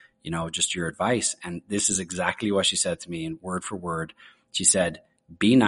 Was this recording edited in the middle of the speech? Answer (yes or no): no